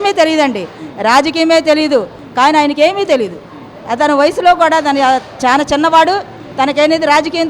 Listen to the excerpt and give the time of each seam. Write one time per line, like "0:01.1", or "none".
0:02.2